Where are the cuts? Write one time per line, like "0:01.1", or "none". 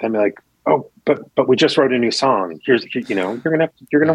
none